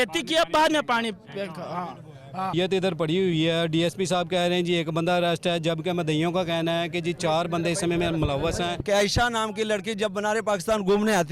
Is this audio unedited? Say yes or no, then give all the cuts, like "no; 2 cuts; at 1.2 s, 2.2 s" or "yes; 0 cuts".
no; 2 cuts; at 2.5 s, 8.8 s